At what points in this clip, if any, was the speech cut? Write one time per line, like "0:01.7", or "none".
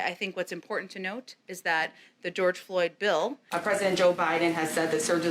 0:03.5